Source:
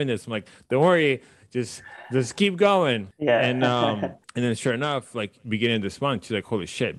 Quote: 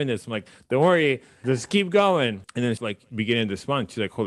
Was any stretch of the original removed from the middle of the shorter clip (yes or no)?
yes